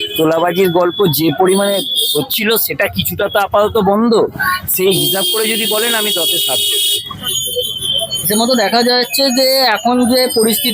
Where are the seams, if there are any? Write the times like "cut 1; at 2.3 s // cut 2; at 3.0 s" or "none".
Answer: cut 1; at 7.3 s